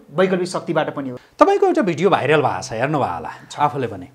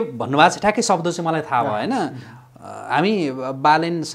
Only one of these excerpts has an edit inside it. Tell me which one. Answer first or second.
first